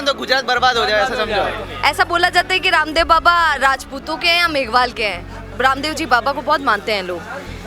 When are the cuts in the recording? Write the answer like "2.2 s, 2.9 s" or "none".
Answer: 1.7 s, 5.5 s